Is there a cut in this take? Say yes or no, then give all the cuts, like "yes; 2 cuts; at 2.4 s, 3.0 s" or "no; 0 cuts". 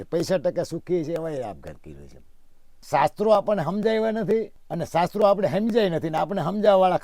yes; 1 cut; at 2.7 s